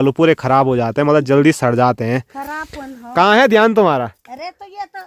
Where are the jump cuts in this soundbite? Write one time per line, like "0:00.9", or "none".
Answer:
none